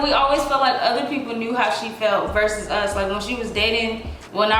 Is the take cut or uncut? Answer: uncut